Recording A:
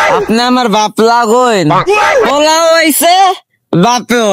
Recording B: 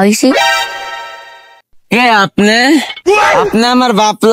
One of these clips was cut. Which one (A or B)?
B